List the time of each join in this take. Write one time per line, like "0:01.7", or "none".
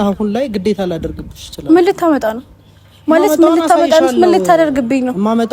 none